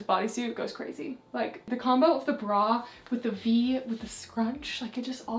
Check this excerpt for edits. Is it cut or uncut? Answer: uncut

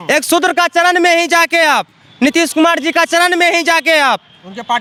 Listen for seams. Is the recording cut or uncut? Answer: uncut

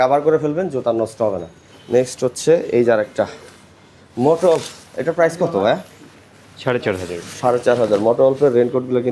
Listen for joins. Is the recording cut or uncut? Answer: uncut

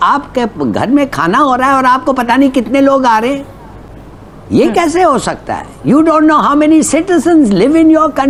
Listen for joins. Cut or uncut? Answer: uncut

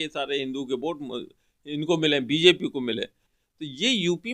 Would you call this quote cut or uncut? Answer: cut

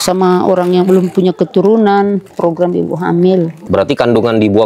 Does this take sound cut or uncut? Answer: cut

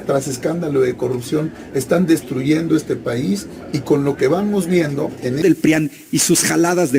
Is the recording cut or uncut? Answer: cut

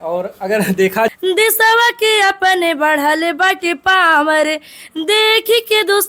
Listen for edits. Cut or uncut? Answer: cut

